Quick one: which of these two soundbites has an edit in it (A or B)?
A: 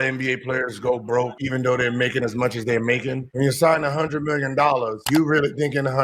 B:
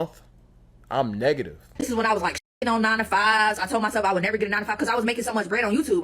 B